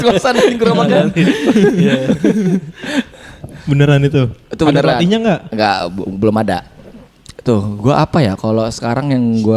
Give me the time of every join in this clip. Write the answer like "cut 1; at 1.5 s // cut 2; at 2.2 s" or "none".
none